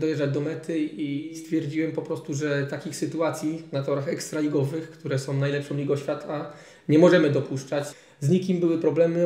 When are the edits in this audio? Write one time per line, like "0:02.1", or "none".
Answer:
0:01.4
0:07.9